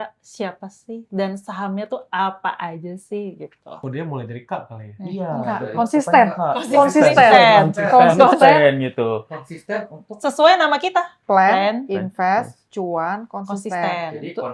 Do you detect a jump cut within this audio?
no; 0 cuts

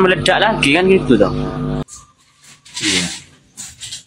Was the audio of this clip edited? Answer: yes; 1 cut; at 1.8 s

